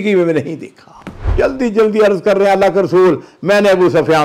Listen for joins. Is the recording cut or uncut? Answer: cut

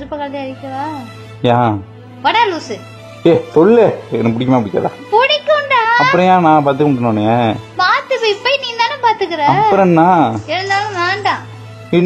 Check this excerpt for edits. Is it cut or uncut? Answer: uncut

